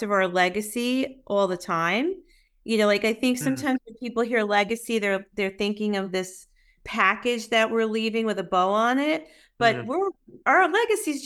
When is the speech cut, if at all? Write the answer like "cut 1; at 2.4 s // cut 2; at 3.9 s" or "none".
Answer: none